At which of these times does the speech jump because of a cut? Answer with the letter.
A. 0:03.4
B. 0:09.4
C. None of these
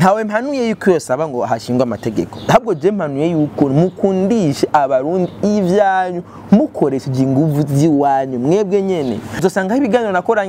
B